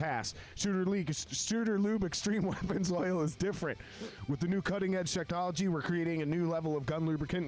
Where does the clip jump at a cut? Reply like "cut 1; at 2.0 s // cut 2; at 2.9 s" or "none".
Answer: none